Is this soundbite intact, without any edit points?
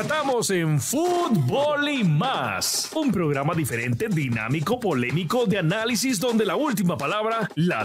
yes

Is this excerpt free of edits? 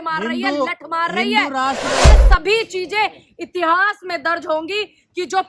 no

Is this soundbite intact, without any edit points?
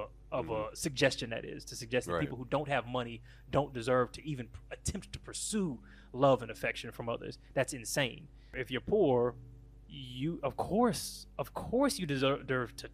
no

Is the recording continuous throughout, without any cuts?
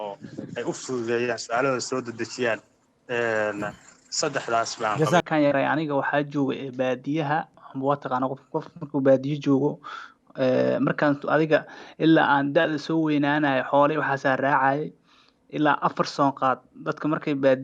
no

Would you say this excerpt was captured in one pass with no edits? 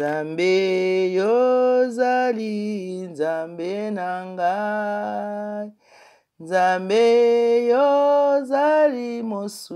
yes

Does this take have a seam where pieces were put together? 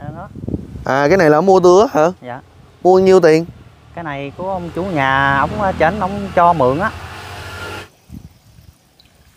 yes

